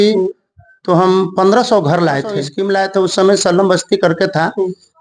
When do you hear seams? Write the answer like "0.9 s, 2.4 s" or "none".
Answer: 2.5 s